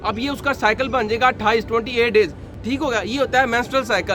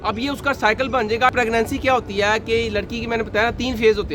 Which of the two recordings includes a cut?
second; 1 cut; at 1.3 s

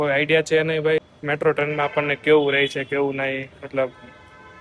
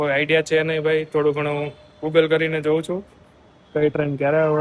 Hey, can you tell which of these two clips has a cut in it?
first; 1 cut; at 1.1 s

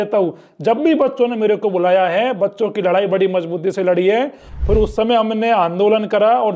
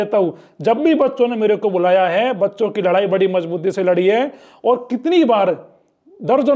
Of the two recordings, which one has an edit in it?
first; 1 cut; at 4.5 s

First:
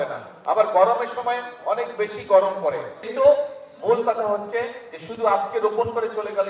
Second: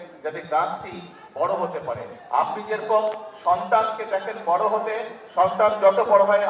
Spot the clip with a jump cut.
first; 1 cut; at 3.1 s

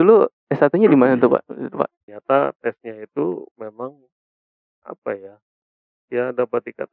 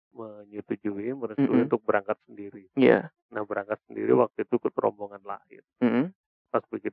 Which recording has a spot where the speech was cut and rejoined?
first; 1 cut; at 2.1 s

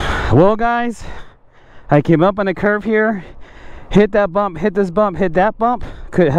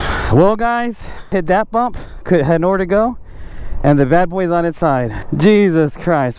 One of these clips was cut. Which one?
second; 2 cuts; at 1.3 s, 5.2 s

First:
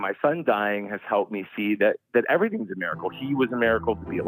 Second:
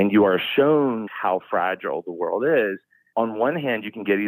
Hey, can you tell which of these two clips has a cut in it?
second; 1 cut; at 1.1 s

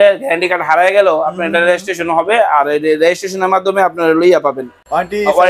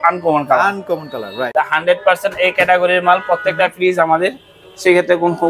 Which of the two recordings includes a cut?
second; 1 cut; at 1.5 s

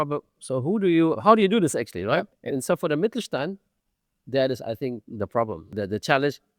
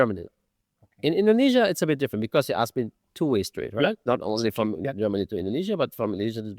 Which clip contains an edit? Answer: first; 2 cuts; at 2.3 s, 5.7 s

